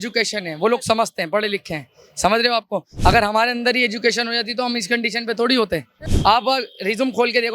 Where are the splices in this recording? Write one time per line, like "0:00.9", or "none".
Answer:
0:06.0